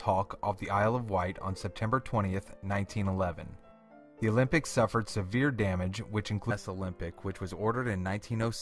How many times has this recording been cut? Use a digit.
0